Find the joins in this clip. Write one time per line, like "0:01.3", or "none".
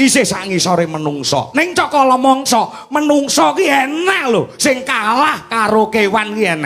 none